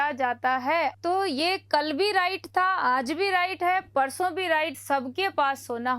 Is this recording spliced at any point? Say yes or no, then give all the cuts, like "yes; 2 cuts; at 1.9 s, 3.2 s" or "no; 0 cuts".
yes; 2 cuts; at 0.9 s, 4.8 s